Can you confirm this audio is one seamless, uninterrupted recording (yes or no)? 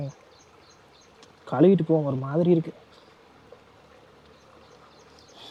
yes